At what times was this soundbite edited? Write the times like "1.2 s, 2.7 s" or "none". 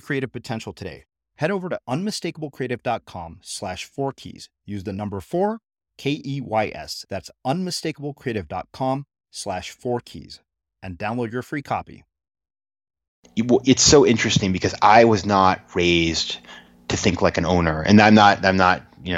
13.1 s